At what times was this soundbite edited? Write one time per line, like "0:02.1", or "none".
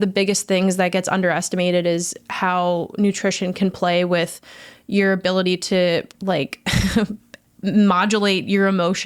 none